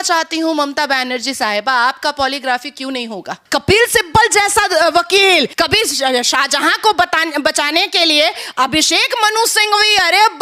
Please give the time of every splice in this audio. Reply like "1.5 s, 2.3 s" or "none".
3.4 s, 5.5 s